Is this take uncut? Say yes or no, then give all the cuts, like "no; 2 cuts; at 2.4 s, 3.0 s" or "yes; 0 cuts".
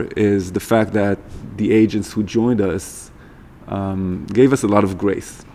yes; 0 cuts